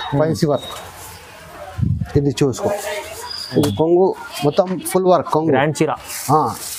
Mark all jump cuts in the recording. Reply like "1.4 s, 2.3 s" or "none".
3.7 s